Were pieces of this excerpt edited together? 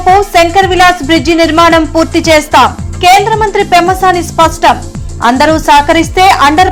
no; 0 cuts

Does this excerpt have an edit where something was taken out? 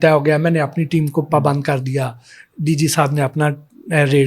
no; 0 cuts

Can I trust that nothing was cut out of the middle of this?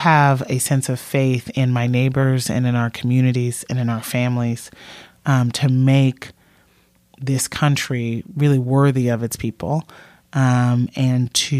yes; 0 cuts

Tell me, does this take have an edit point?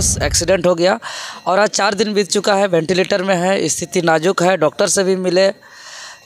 no; 0 cuts

